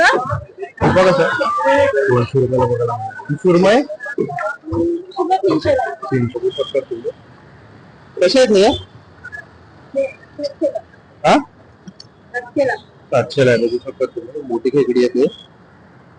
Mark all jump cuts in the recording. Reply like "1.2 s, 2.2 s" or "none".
6.3 s